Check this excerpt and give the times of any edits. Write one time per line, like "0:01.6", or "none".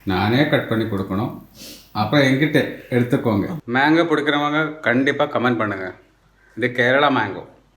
0:03.6